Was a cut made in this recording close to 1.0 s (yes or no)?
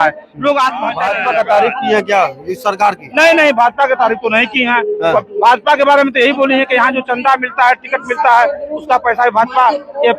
yes